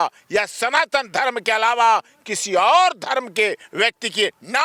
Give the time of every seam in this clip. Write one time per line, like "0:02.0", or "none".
none